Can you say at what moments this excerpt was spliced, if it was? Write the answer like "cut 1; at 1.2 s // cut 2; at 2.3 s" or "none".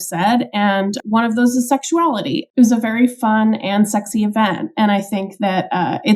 cut 1; at 1.0 s // cut 2; at 2.4 s